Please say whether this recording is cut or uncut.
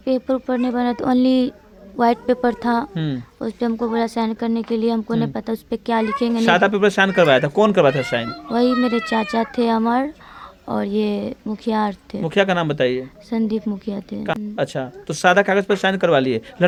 uncut